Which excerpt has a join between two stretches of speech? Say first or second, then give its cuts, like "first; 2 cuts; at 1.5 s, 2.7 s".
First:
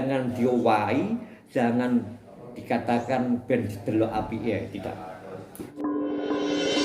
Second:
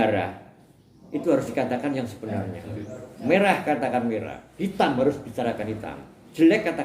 first; 1 cut; at 5.8 s